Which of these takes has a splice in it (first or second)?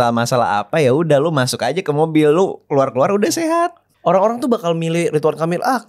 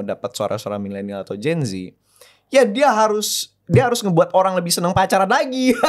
first